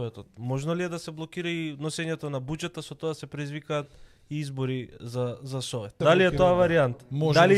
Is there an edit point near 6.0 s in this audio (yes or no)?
yes